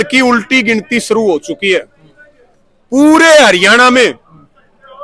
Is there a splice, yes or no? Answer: no